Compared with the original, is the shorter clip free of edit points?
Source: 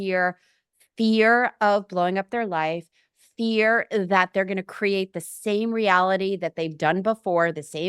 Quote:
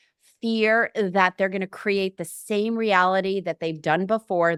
yes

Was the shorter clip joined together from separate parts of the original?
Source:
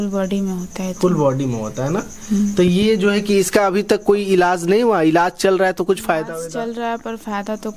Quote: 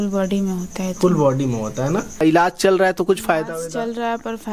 yes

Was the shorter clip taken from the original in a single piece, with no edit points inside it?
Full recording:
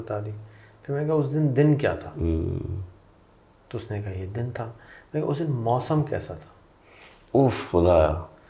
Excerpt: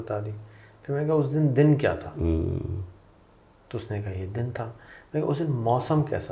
yes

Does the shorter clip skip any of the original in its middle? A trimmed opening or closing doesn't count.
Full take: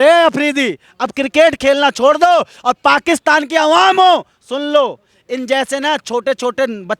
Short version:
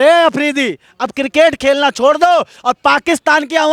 no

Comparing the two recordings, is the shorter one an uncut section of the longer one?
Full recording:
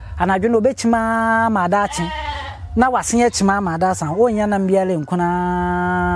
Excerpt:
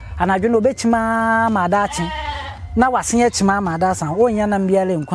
yes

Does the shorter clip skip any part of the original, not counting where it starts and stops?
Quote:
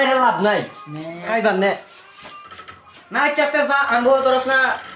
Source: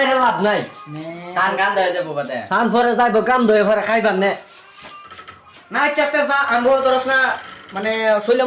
yes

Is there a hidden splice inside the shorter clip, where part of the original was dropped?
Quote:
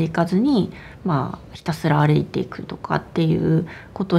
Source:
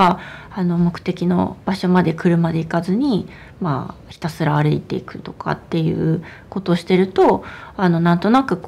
no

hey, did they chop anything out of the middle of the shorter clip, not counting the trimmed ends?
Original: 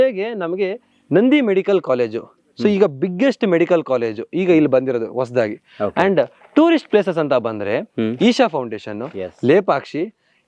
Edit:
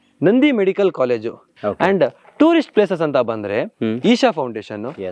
yes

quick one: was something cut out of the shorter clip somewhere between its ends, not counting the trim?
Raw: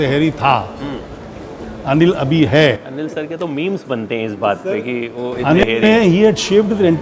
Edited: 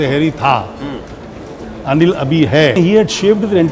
yes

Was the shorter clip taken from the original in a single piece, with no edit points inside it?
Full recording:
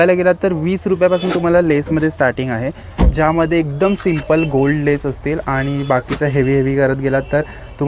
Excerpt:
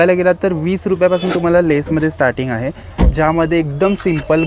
yes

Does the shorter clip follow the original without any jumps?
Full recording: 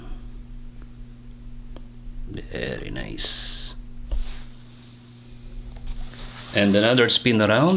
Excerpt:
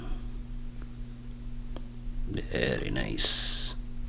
yes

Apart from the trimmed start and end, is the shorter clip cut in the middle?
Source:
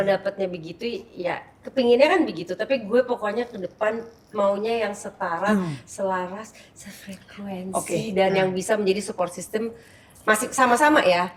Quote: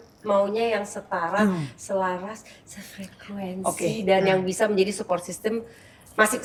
no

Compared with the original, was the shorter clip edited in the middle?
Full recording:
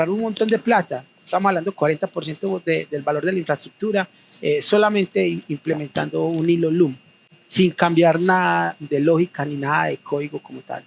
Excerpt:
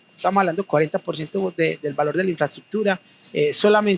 no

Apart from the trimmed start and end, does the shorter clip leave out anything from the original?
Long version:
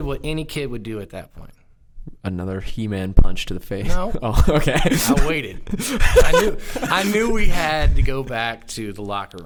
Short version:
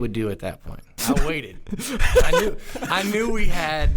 yes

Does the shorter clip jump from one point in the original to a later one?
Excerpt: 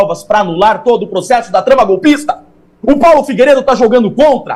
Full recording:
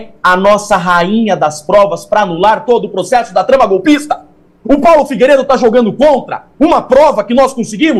no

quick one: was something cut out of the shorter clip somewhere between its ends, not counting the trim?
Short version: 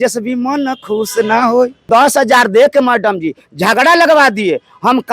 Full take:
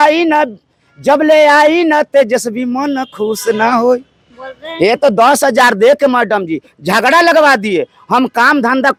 yes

